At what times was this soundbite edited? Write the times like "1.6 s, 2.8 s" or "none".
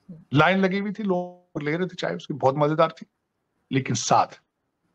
none